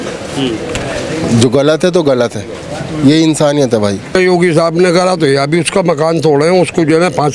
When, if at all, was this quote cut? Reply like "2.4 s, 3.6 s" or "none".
4.1 s

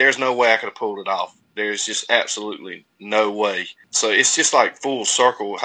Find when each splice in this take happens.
3.8 s

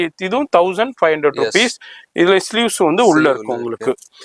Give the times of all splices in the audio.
none

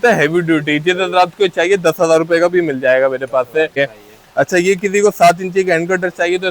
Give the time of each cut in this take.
3.8 s

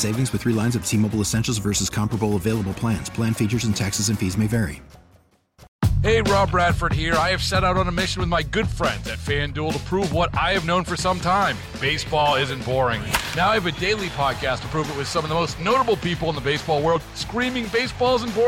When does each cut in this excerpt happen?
5.7 s

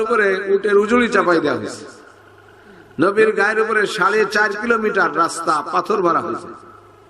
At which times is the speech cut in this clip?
none

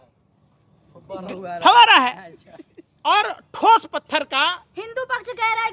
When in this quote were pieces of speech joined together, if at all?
none

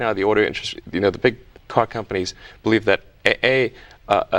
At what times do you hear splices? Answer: none

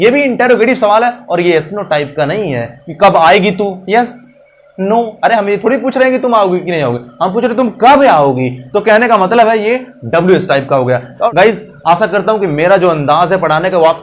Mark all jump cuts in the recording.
11.3 s

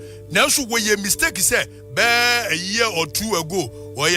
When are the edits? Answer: none

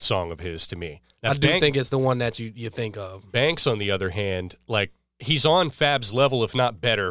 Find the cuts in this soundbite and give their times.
1.0 s, 5.1 s

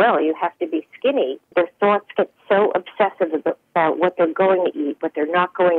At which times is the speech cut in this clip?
1.4 s

